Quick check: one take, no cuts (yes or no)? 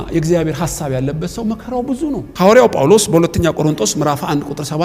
no